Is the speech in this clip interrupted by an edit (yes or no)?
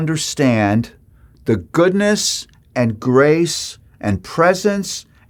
no